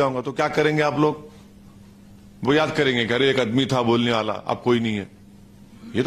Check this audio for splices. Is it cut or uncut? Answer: uncut